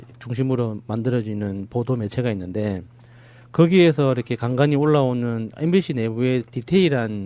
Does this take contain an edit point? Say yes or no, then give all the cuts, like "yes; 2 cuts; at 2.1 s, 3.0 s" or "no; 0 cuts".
no; 0 cuts